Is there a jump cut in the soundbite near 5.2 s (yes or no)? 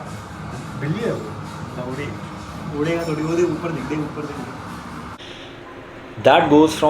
yes